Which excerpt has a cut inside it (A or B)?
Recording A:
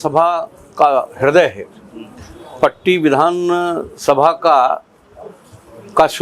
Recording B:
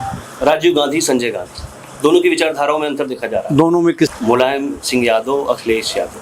B